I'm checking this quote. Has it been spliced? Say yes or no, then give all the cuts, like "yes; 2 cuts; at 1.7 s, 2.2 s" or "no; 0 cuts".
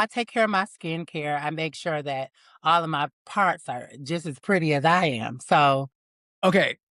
no; 0 cuts